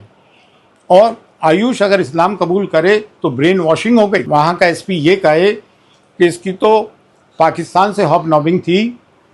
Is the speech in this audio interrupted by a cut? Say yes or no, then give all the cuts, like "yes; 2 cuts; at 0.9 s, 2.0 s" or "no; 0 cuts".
yes; 1 cut; at 4.2 s